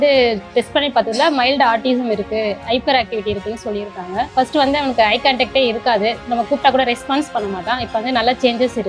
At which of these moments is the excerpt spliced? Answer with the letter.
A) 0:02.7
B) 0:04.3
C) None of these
B